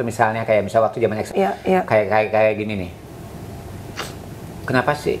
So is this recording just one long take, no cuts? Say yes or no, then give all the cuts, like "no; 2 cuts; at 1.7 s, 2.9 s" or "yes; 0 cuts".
no; 1 cut; at 1.3 s